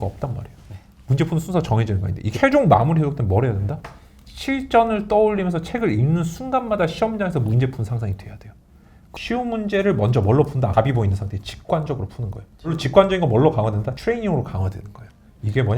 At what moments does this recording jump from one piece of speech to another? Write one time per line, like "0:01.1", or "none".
0:02.2
0:09.0
0:10.7
0:12.8
0:13.9